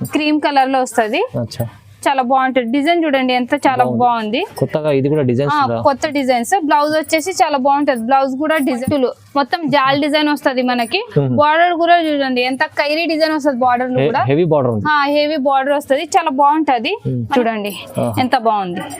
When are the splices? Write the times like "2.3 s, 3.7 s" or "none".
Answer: 8.8 s, 17.3 s